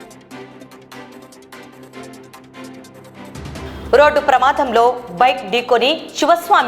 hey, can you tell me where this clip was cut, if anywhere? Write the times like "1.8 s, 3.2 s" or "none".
1.8 s, 2.5 s